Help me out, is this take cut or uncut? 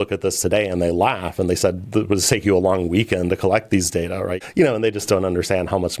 cut